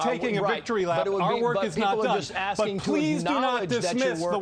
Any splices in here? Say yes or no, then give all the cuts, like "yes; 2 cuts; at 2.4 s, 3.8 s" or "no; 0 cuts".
no; 0 cuts